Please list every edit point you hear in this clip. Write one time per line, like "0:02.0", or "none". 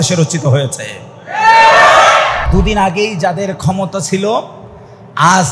0:02.4